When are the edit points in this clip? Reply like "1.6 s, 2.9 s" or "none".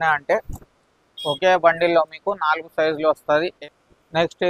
3.6 s